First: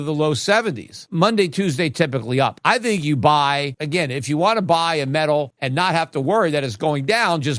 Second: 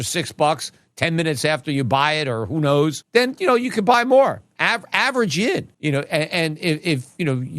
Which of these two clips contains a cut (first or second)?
first